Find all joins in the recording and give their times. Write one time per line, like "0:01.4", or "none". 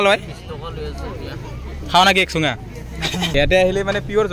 0:03.3